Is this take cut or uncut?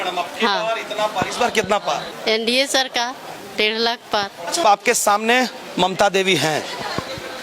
cut